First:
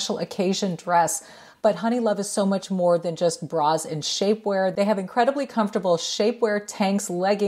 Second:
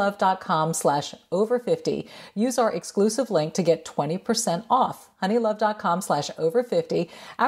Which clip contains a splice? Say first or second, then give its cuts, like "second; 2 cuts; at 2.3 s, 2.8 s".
first; 1 cut; at 1.4 s